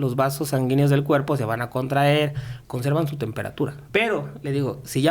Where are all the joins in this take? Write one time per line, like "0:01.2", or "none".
0:02.5
0:03.8